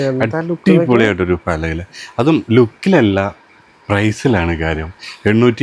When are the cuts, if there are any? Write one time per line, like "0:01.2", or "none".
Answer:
none